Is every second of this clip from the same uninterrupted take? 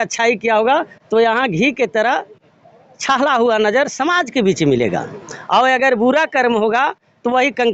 yes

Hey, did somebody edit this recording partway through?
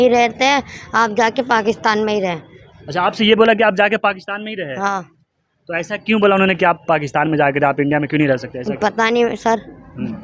no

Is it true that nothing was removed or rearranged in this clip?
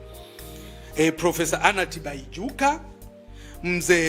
no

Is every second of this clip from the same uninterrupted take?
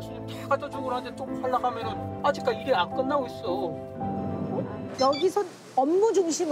no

